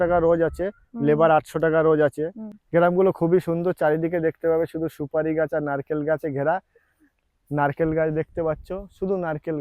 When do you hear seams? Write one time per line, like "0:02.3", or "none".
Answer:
0:02.4